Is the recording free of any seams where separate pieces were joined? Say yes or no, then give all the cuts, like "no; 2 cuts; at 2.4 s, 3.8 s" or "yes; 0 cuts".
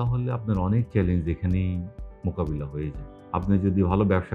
yes; 0 cuts